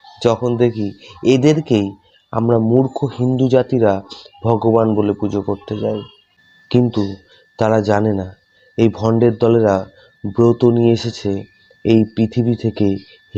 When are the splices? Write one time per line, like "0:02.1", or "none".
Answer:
none